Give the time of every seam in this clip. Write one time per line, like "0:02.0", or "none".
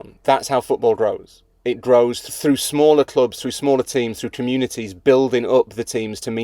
0:02.2